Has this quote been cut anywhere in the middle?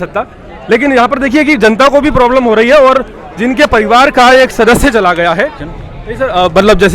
yes; 1 cut; at 5.4 s

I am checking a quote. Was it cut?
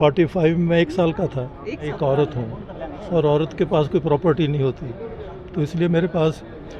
yes; 1 cut; at 1.9 s

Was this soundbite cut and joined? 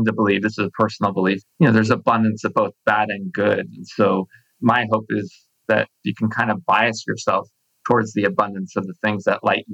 yes; 2 cuts; at 1.5 s, 6.0 s

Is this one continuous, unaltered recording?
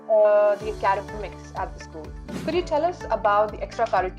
no; 1 cut; at 2.4 s

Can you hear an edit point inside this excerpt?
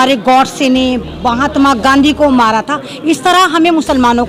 no; 0 cuts

